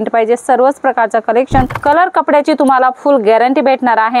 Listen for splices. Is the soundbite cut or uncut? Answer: cut